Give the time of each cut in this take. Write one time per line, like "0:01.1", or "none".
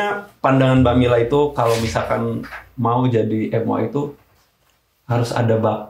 none

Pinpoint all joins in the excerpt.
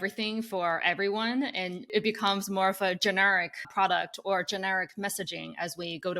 0:01.9
0:03.7

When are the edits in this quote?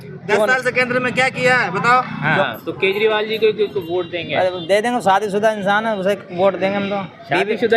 0:02.3

